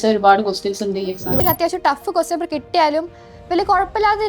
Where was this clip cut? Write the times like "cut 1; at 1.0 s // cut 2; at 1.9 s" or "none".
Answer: cut 1; at 1.4 s